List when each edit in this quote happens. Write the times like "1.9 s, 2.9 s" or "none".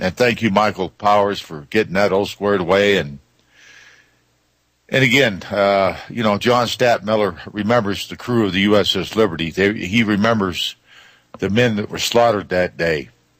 1.4 s